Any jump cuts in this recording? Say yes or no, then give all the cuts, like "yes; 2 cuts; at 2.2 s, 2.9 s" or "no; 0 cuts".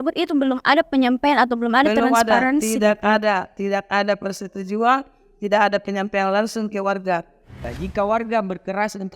yes; 1 cut; at 7.5 s